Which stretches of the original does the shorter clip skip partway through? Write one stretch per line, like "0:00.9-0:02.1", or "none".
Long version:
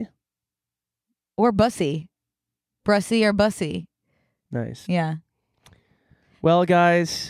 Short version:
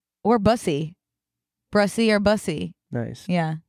0:03.9-0:04.4